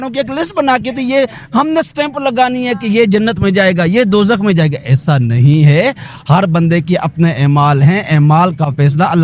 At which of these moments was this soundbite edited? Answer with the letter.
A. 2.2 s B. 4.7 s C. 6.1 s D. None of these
D